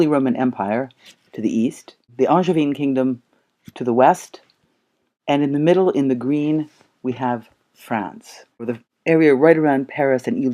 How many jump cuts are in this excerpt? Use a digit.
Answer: 1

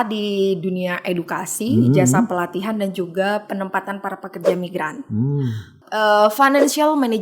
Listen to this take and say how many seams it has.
1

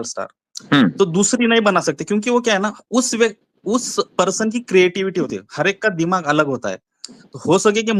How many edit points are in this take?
0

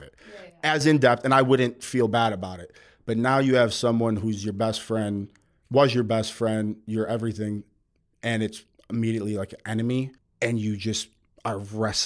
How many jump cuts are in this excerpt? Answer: 1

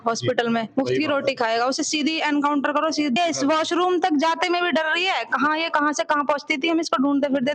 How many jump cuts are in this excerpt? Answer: 1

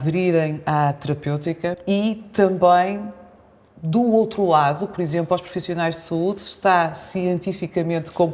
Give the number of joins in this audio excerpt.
1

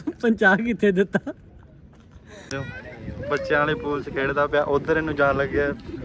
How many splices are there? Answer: 1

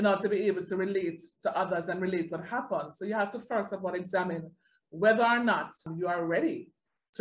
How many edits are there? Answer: 1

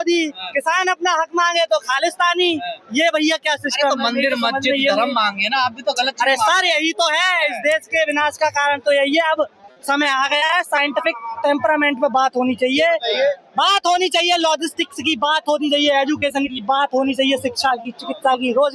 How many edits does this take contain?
0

